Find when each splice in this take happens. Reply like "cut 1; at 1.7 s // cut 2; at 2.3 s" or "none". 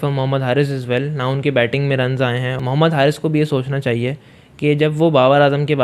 cut 1; at 2.5 s

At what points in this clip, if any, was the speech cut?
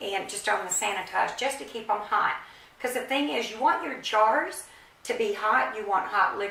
none

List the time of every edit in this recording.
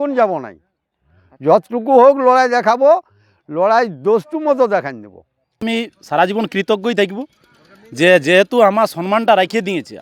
cut 1; at 5.6 s

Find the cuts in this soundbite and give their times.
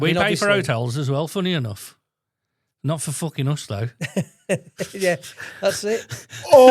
none

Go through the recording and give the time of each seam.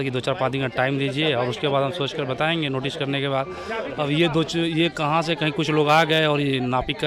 none

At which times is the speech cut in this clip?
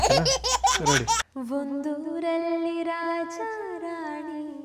cut 1; at 1.3 s

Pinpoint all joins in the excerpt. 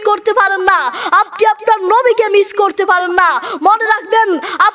none

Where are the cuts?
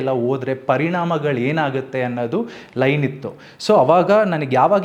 none

